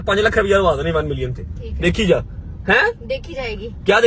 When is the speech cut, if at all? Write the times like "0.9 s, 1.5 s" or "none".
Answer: none